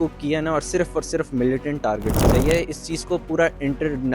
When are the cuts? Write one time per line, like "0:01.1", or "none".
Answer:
0:02.2

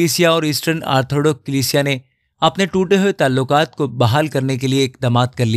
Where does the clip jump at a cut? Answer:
none

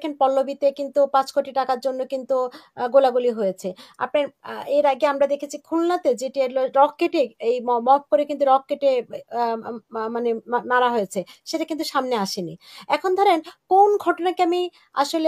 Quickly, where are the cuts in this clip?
none

